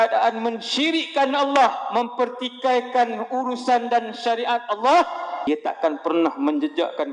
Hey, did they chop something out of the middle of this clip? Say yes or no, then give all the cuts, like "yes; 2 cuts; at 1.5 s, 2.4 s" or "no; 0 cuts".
yes; 1 cut; at 5.4 s